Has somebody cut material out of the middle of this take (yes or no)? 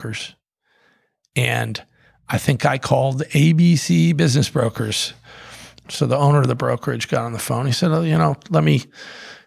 no